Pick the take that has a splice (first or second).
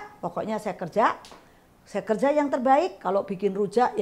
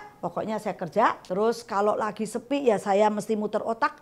second